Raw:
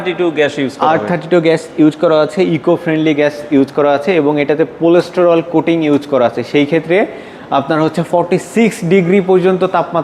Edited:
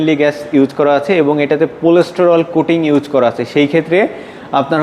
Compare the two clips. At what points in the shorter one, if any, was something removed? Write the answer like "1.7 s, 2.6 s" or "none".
none